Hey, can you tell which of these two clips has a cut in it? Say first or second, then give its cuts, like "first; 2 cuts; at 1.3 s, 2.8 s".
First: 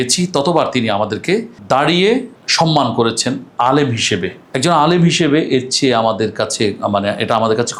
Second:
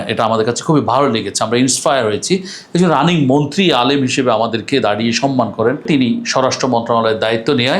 second; 1 cut; at 5.9 s